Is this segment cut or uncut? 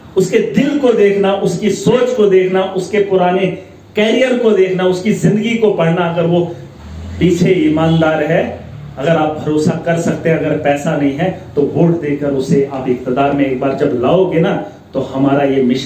cut